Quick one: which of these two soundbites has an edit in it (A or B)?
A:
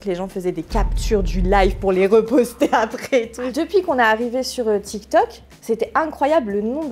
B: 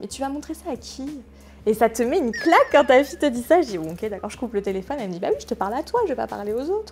A